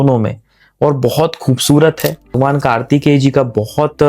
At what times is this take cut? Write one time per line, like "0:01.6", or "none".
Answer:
0:02.3